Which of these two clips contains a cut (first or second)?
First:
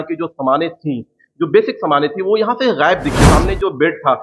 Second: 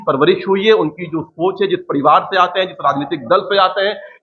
first